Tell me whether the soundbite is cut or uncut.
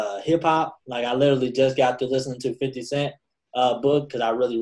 uncut